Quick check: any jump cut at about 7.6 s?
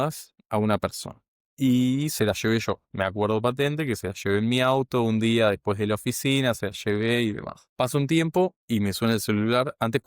yes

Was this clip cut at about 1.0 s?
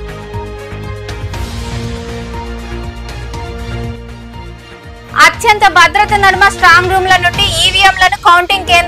yes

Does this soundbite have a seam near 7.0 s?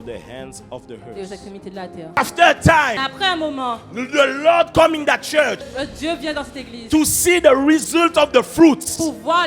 no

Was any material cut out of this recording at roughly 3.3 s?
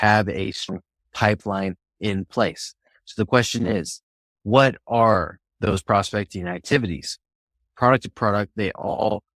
no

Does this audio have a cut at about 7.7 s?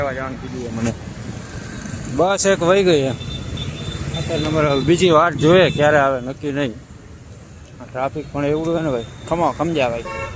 no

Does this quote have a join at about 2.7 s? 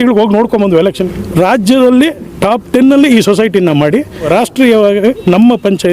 no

